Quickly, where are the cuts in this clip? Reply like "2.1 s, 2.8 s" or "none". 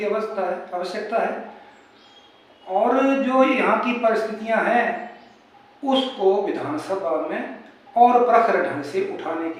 none